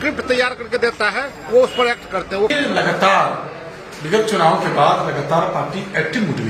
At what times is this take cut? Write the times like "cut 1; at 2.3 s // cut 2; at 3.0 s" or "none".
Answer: cut 1; at 2.5 s